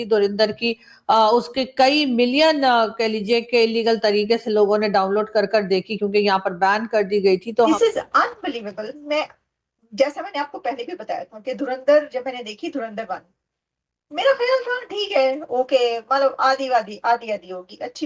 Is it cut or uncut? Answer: cut